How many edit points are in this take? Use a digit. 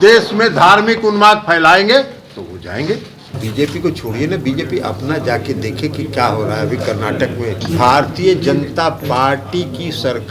2